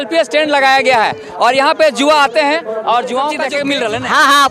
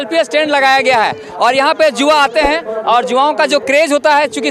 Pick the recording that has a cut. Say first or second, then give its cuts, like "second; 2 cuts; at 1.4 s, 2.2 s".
first; 1 cut; at 3.6 s